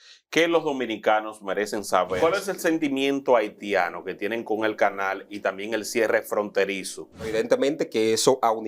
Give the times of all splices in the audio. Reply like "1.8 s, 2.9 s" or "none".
2.2 s, 7.3 s